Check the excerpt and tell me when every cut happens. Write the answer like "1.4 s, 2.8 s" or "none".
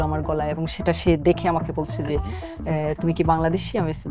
none